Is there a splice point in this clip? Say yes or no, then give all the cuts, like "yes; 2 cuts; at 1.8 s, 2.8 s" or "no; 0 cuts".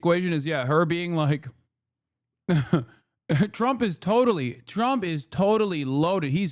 no; 0 cuts